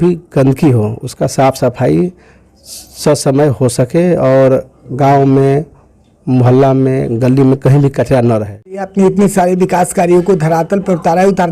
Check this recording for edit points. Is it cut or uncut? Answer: cut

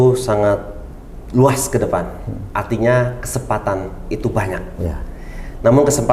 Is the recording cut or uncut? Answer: uncut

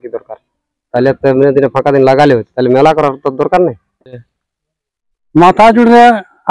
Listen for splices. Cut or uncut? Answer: cut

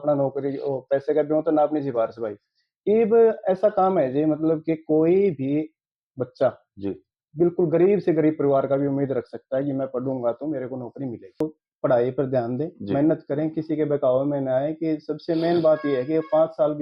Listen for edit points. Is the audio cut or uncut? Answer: cut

